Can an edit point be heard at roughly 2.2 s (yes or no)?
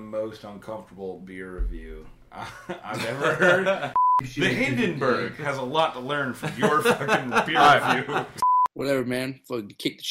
no